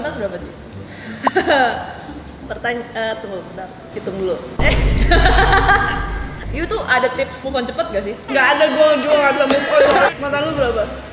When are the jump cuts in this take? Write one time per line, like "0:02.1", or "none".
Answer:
0:06.5
0:10.1